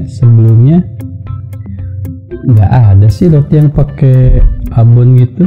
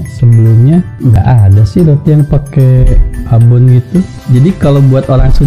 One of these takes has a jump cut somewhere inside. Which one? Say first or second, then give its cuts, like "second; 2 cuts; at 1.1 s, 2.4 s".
second; 2 cuts; at 1.1 s, 4.2 s